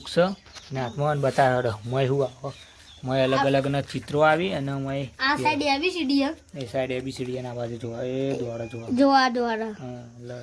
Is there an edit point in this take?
no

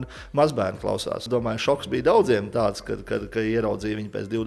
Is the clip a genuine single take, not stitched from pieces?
no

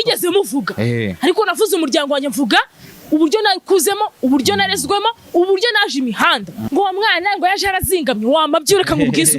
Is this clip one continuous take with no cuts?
no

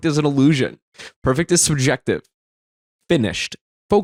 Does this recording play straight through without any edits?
yes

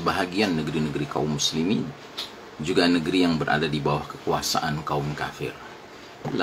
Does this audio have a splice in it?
no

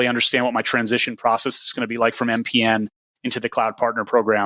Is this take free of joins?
yes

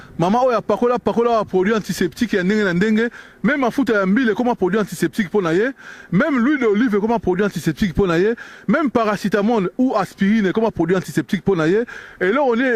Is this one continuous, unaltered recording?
yes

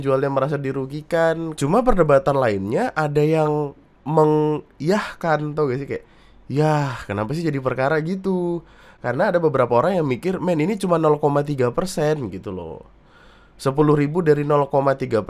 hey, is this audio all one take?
no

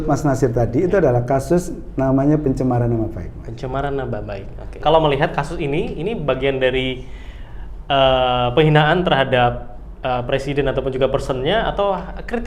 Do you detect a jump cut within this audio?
yes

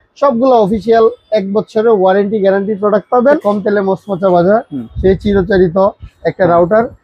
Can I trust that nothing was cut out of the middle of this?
no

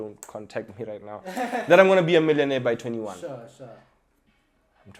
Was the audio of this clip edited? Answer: no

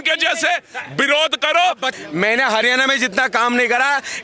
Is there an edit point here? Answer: yes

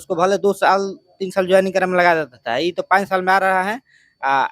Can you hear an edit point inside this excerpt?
no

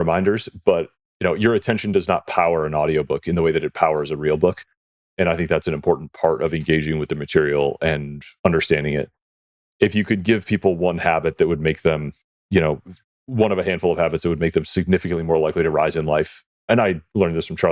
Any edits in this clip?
no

